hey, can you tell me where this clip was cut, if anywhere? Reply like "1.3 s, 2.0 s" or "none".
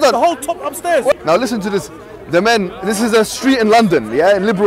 1.1 s